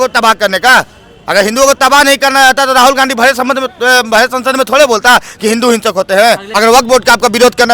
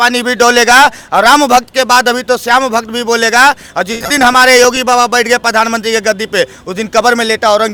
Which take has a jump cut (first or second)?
first